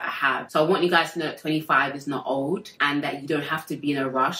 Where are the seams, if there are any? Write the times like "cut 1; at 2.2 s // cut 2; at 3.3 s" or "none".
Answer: none